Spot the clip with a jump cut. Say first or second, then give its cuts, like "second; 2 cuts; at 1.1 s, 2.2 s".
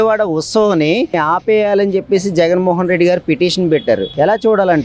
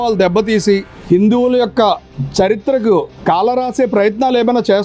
first; 1 cut; at 1.1 s